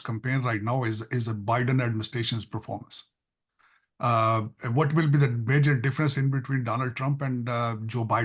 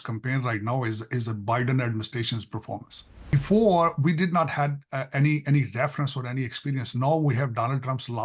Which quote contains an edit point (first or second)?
second